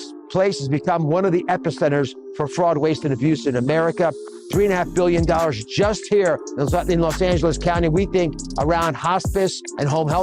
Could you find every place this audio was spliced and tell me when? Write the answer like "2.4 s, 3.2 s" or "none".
1.4 s